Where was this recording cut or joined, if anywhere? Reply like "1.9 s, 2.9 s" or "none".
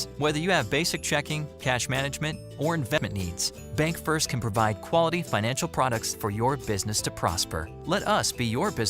3.0 s